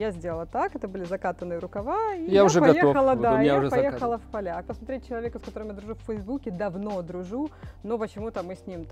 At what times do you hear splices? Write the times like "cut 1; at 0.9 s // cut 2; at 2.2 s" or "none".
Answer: none